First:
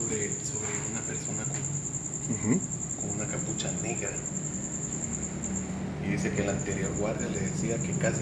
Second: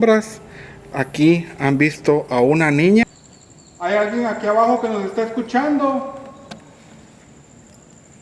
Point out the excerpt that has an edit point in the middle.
second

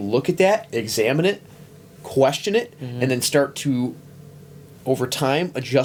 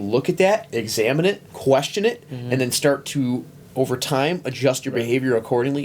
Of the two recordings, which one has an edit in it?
second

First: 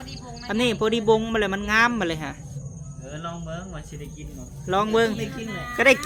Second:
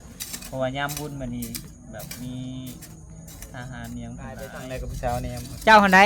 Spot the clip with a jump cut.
second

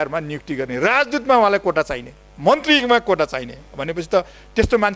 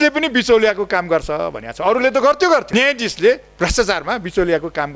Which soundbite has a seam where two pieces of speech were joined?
second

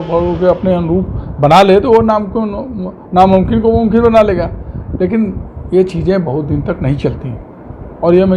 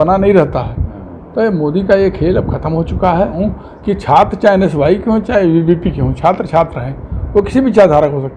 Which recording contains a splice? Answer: second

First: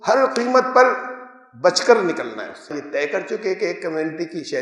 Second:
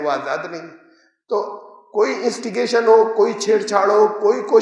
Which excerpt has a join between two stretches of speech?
first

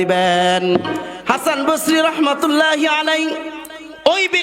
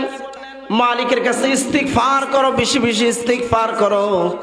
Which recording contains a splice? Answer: first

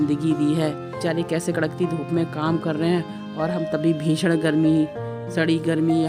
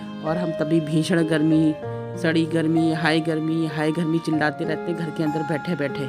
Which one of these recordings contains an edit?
first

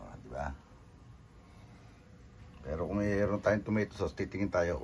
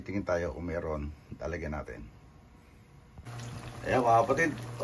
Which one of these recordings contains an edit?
second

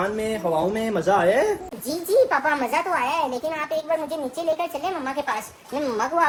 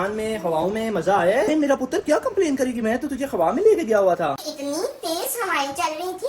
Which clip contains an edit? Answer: second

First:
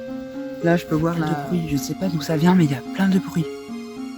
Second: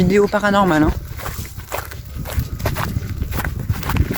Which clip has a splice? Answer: first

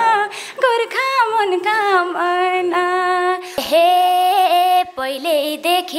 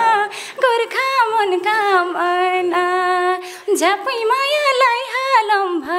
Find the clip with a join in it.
first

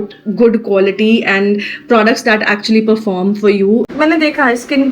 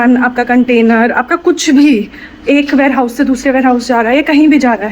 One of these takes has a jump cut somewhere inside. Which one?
first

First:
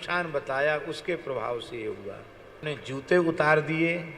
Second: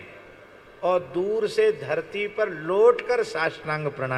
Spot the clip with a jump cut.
first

